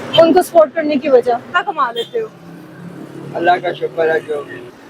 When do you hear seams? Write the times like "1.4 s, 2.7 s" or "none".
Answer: 1.5 s